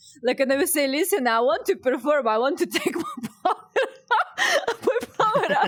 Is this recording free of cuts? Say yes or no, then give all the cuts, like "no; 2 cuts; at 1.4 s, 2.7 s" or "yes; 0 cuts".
yes; 0 cuts